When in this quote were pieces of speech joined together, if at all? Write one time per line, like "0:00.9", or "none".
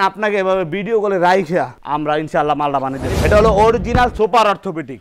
0:03.1